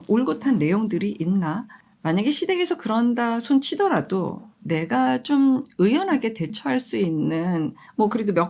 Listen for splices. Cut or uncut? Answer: uncut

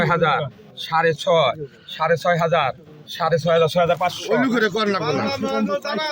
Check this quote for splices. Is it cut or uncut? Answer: cut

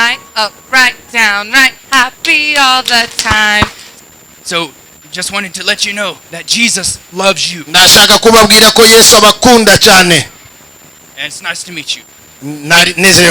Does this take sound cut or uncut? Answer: cut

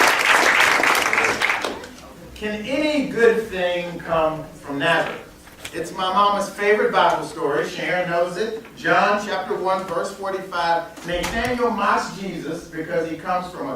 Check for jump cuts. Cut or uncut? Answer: cut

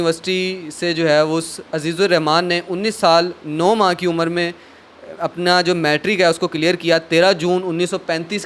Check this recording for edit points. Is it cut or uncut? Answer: uncut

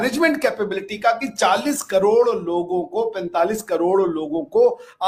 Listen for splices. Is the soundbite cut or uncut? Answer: uncut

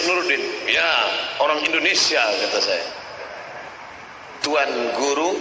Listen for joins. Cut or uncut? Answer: cut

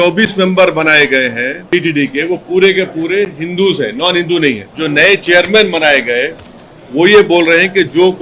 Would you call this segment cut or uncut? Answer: cut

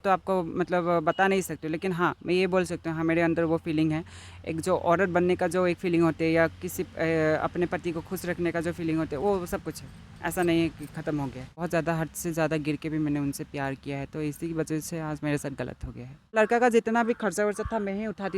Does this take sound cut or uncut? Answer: cut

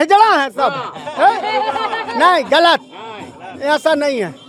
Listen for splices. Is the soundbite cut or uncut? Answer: uncut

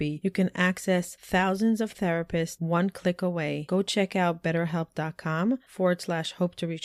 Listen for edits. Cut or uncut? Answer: uncut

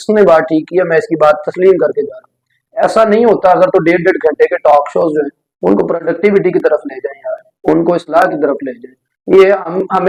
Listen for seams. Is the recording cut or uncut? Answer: uncut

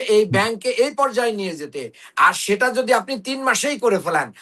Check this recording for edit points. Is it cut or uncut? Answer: uncut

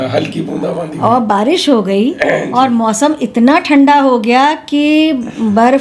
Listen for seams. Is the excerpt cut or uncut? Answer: uncut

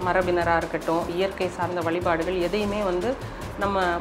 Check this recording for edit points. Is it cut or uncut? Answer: cut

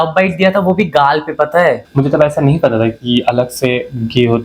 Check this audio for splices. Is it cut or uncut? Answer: cut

